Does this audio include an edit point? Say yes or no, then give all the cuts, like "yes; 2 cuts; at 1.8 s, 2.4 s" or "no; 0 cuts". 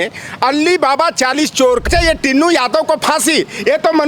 yes; 1 cut; at 1.9 s